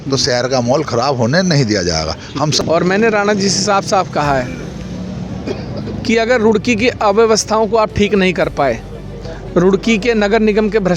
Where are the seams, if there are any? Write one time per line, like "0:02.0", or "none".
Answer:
0:02.6